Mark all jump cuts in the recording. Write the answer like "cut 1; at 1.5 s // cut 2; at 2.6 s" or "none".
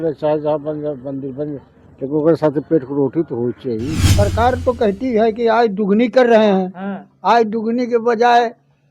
cut 1; at 4.0 s